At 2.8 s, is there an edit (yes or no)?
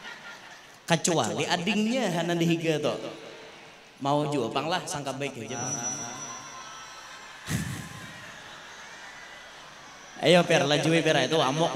no